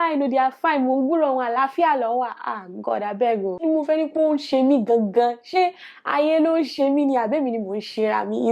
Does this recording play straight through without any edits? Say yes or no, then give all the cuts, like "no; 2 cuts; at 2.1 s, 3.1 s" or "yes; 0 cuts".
no; 1 cut; at 3.6 s